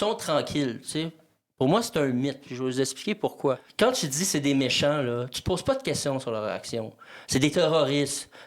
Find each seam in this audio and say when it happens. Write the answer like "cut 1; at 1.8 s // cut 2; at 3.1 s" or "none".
cut 1; at 3.7 s